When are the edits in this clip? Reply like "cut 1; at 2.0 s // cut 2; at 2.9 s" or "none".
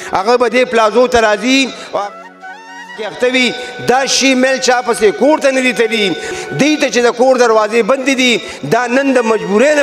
cut 1; at 6.3 s